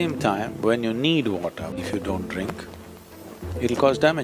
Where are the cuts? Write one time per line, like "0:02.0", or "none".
0:01.8